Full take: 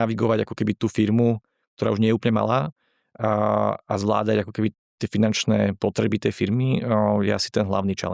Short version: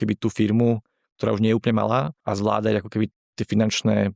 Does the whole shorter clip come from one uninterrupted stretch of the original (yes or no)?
no